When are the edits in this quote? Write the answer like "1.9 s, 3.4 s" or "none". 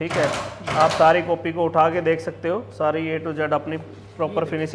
none